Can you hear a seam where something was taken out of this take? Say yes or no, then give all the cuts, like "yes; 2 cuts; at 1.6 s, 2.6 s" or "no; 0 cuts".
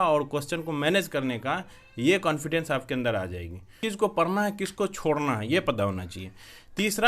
yes; 1 cut; at 3.8 s